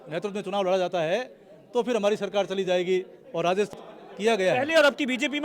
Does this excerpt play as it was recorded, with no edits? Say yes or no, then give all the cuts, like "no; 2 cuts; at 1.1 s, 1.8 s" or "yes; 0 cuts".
no; 1 cut; at 3.7 s